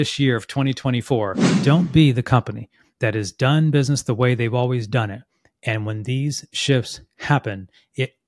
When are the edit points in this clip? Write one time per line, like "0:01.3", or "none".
0:01.5